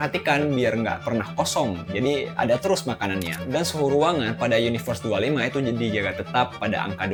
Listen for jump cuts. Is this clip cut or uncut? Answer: uncut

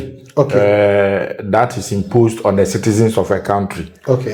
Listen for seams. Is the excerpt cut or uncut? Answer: uncut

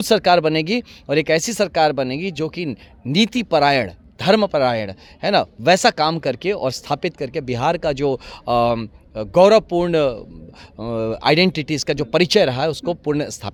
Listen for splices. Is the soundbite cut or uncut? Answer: uncut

